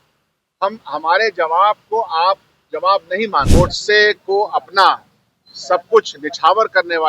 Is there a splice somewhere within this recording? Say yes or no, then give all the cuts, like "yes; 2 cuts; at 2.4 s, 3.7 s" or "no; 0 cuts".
yes; 1 cut; at 3.5 s